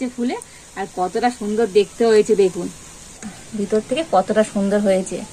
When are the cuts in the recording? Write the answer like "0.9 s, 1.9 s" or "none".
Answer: 3.4 s

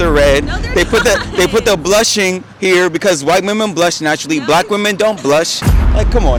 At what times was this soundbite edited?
none

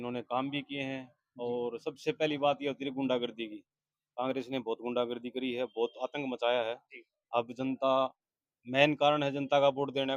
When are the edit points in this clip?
none

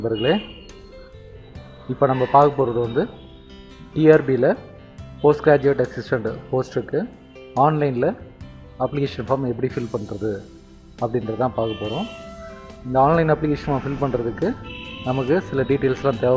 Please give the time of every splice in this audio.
11.1 s

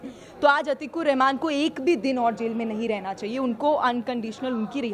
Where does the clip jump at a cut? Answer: none

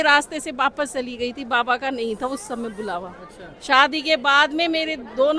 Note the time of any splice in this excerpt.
none

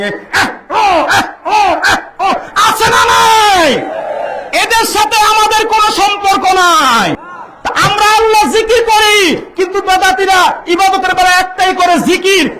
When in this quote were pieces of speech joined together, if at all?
7.1 s

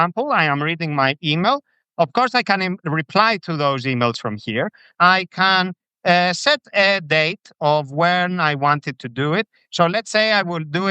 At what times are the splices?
4.8 s

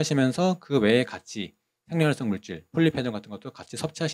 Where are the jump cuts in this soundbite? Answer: none

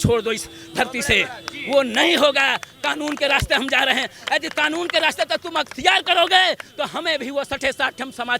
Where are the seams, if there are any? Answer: none

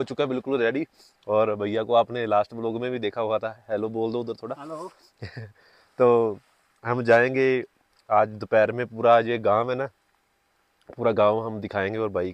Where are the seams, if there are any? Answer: none

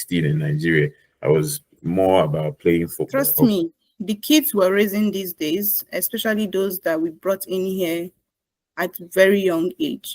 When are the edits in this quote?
3.0 s

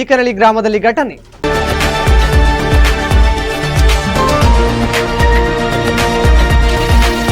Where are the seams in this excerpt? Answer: 1.3 s

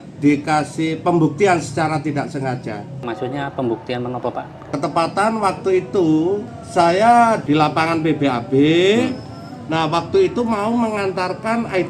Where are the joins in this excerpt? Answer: 3.0 s, 4.7 s, 6.5 s, 7.4 s

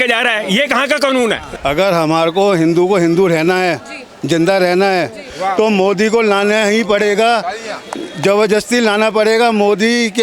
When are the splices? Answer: 1.5 s, 5.3 s

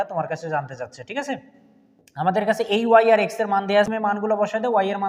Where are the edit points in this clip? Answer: 3.9 s

